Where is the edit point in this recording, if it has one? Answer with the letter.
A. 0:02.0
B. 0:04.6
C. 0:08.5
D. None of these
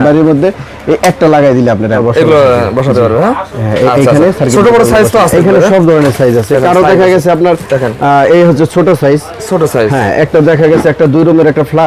A